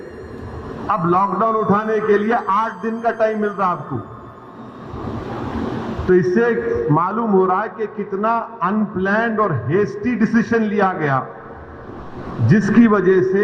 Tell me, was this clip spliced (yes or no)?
no